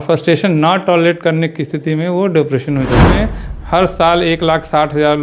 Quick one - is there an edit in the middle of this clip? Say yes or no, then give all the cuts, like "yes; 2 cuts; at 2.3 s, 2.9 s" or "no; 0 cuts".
yes; 1 cut; at 3.1 s